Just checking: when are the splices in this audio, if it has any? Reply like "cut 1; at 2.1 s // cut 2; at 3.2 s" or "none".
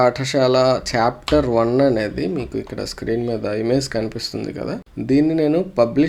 none